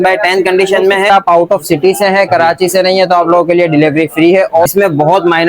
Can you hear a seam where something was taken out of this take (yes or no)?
yes